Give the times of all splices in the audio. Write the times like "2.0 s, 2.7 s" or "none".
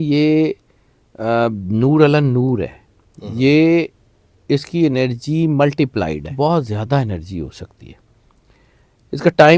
6.3 s